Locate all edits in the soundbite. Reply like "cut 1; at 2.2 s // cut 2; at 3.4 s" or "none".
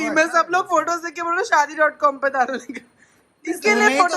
none